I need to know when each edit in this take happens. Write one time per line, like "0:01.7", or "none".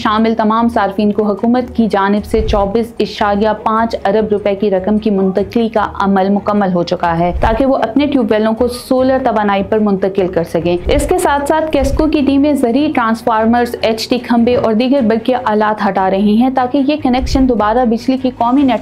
none